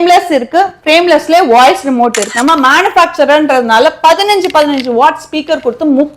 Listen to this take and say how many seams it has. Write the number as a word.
one